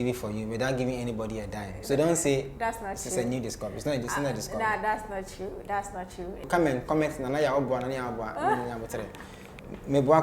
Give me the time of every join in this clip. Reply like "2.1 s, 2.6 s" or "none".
6.4 s